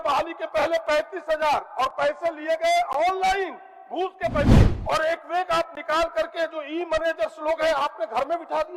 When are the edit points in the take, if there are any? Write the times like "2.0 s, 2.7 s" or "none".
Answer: 4.7 s